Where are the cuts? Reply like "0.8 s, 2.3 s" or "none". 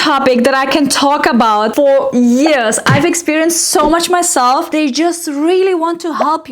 4.7 s